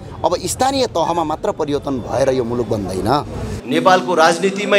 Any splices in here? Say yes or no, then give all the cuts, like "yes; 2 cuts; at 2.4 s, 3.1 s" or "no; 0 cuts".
yes; 1 cut; at 3.5 s